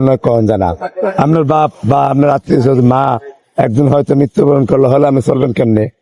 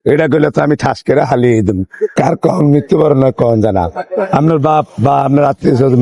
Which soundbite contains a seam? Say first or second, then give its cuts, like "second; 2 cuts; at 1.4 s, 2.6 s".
second; 1 cut; at 2.0 s